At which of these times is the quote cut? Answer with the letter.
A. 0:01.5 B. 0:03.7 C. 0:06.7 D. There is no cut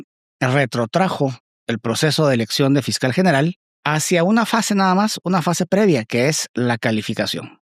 B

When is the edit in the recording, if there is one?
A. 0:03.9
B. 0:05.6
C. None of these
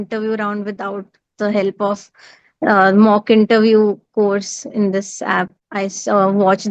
B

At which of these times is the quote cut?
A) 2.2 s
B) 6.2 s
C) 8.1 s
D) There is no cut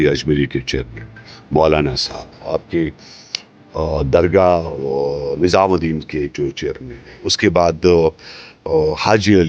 D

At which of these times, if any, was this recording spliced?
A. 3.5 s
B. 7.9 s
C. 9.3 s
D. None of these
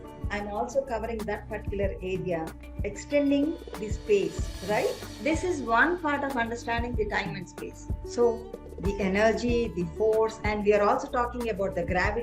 B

